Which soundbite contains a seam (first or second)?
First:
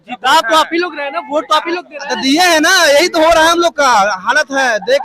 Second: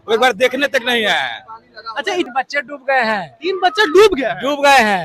second